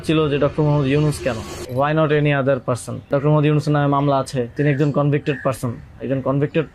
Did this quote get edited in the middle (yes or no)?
yes